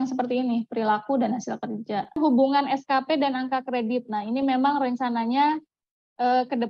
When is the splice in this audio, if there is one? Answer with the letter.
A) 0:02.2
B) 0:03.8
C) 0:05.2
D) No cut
A